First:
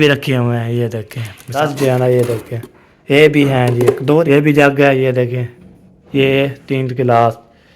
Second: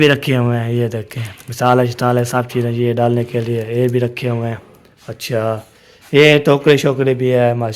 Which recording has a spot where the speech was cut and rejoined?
first; 2 cuts; at 1.5 s, 4.2 s

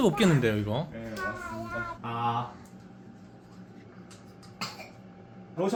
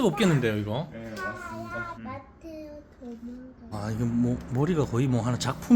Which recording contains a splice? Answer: second; 2 cuts; at 2.0 s, 3.7 s

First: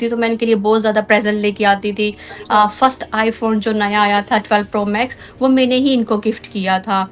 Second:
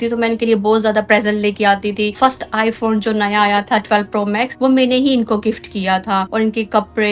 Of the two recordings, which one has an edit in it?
second; 3 cuts; at 2.1 s, 4.5 s, 6.3 s

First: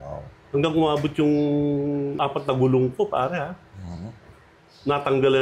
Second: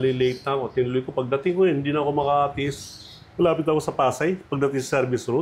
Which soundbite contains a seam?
first; 1 cut; at 2.2 s

